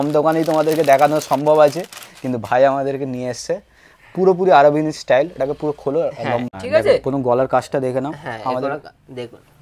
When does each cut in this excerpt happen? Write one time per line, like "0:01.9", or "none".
0:06.5